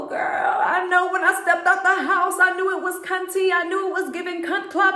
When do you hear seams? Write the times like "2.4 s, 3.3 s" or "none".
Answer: none